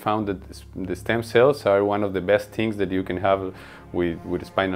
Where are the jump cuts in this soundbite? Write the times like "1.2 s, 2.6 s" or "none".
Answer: none